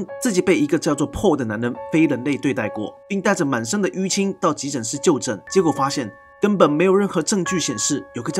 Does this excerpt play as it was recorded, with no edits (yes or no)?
no